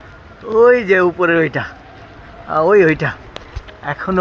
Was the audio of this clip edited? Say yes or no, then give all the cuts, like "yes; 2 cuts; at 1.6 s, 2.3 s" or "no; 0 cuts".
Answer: no; 0 cuts